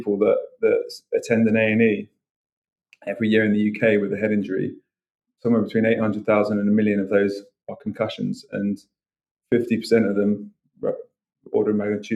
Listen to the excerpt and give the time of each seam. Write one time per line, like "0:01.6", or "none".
none